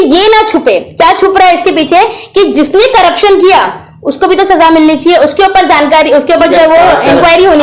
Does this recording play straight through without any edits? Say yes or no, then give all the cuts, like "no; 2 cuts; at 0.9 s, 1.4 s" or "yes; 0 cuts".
yes; 0 cuts